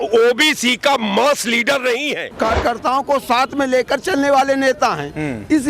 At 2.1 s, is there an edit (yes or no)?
yes